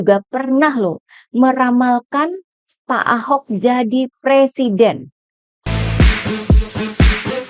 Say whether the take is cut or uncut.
cut